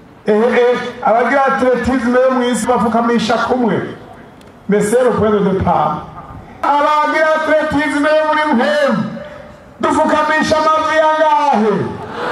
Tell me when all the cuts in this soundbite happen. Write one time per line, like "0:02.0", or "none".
0:02.6
0:06.6